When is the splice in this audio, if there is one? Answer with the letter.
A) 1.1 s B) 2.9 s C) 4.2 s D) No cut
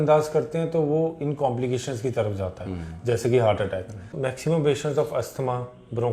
C